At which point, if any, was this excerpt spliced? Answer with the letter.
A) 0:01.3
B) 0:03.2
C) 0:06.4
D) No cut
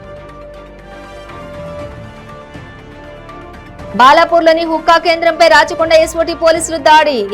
B